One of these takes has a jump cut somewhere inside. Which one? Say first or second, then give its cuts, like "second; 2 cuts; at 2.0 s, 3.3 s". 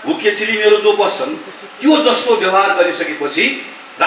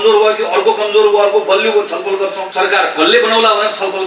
second; 1 cut; at 2.4 s